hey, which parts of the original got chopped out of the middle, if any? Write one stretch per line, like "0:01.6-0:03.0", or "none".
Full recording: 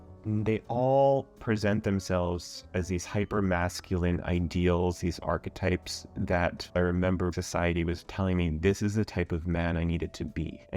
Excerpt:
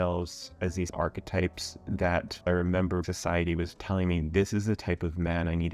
0:03.0-0:05.2